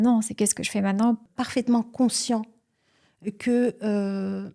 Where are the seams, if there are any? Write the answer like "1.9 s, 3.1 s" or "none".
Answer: 1.3 s